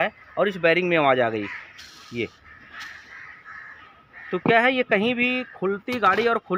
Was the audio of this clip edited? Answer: no; 0 cuts

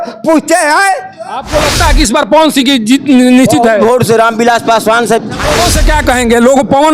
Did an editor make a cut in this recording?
yes; 2 cuts; at 1.4 s, 5.6 s

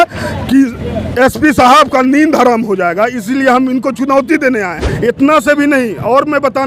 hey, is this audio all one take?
no; 1 cut; at 4.8 s

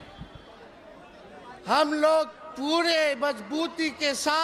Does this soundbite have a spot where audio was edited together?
no; 0 cuts

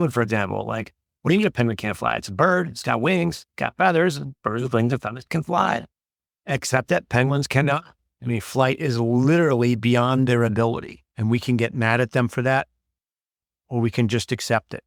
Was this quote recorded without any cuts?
yes; 0 cuts

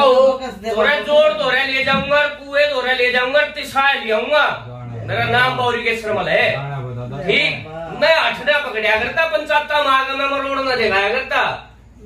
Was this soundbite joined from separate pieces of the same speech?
no; 0 cuts

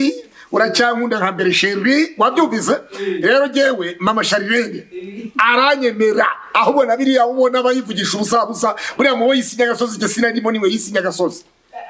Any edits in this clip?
no; 0 cuts

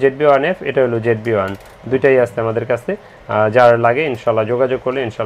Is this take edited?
no; 0 cuts

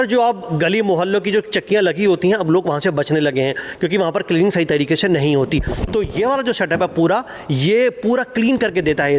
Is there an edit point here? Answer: no; 0 cuts

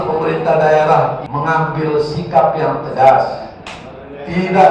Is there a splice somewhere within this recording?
yes; 1 cut; at 1.2 s

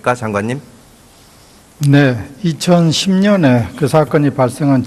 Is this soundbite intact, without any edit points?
no; 1 cut; at 1.1 s

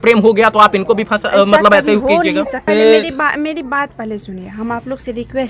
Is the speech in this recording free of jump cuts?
no; 1 cut; at 2.6 s

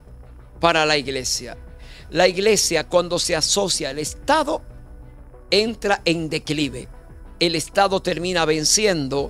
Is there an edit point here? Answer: no; 0 cuts

